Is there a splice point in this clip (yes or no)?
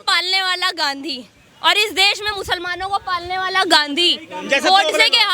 no